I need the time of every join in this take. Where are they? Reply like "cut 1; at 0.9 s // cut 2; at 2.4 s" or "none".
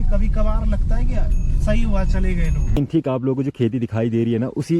cut 1; at 2.7 s